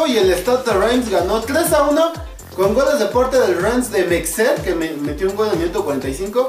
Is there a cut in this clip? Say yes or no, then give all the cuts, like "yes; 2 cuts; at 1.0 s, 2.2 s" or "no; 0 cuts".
yes; 1 cut; at 3.1 s